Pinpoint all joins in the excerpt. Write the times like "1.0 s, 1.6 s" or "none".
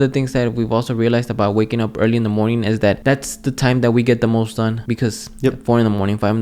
3.0 s, 4.8 s